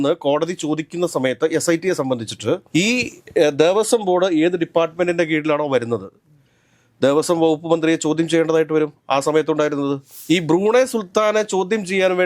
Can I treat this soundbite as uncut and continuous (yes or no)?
no